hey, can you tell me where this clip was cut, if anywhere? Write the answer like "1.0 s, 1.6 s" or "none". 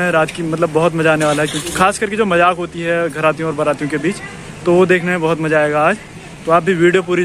1.7 s